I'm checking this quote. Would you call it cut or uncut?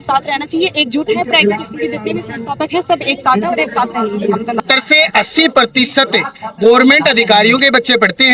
cut